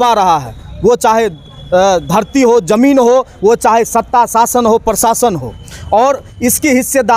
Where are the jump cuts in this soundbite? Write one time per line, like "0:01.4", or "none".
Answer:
none